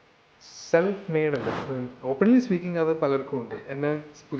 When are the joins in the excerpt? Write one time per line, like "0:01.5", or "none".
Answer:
0:01.5